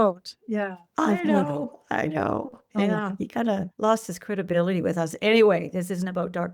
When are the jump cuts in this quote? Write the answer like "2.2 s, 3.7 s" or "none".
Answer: 3.7 s

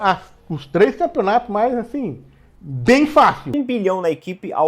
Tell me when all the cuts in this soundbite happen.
3.5 s

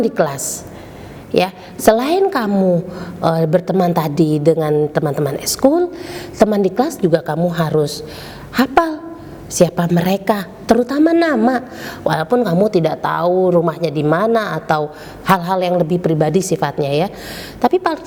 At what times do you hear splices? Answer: none

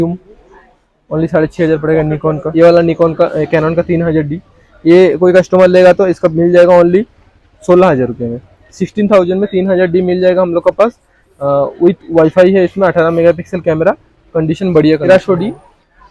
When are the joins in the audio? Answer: 2.4 s, 15.1 s

